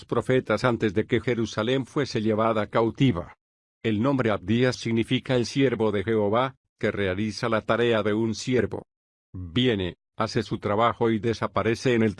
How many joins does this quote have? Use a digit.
1